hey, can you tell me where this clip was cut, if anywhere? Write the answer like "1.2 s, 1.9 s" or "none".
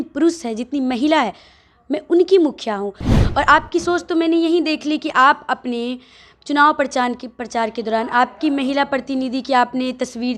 3.1 s